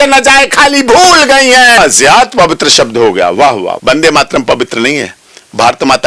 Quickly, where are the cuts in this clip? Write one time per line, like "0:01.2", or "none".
0:01.8
0:03.8